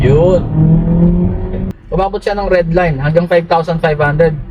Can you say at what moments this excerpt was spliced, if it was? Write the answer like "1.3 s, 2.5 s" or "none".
1.6 s